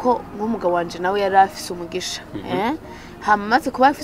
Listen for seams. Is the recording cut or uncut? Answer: uncut